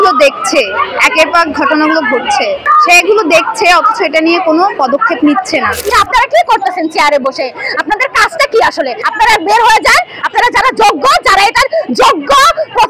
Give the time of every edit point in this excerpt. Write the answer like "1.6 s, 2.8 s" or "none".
2.7 s, 5.9 s, 9.0 s